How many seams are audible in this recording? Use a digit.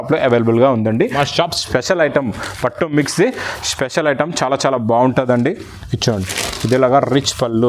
1